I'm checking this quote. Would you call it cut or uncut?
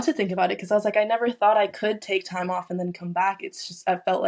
uncut